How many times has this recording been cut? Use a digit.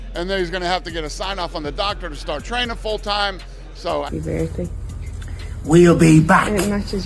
1